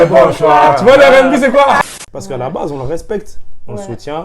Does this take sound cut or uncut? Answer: cut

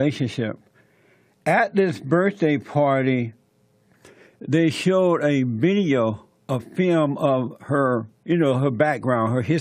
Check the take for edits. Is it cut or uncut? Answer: uncut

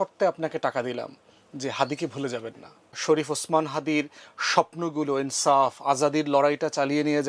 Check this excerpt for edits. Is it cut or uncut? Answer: cut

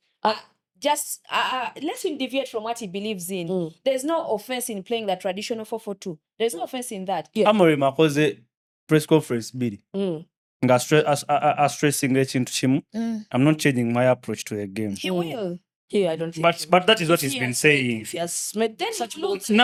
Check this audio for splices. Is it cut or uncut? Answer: uncut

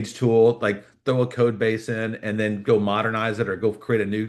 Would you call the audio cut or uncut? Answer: uncut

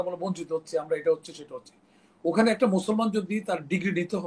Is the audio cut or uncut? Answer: uncut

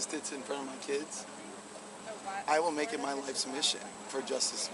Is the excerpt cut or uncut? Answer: cut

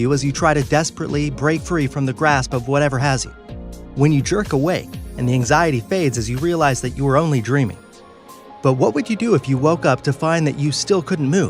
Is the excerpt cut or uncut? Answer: cut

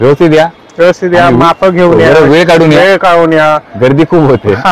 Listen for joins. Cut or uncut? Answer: uncut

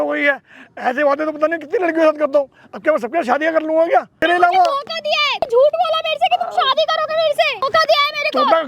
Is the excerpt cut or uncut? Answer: cut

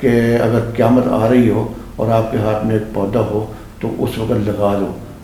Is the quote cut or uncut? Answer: uncut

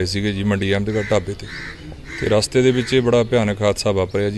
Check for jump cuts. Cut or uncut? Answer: uncut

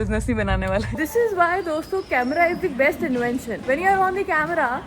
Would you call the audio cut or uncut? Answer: cut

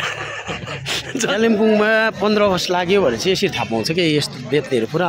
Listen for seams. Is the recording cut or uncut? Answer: cut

